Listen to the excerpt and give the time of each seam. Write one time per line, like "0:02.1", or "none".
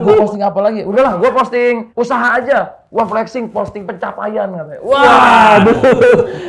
0:00.9
0:01.9